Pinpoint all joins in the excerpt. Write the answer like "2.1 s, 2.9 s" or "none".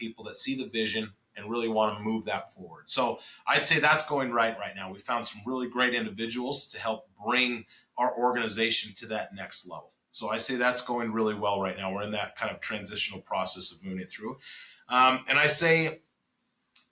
none